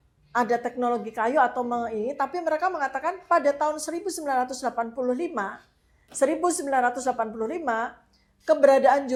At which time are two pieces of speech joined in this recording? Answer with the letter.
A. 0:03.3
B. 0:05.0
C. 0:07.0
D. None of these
D